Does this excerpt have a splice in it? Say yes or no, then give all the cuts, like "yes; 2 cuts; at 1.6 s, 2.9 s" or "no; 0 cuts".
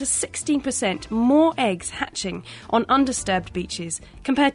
no; 0 cuts